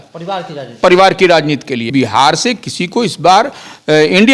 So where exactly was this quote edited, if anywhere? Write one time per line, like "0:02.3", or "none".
0:01.9